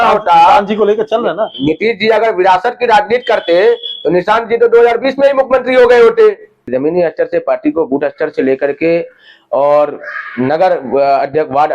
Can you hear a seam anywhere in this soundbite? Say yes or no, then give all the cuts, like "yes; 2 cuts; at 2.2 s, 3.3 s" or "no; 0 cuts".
yes; 1 cut; at 6.7 s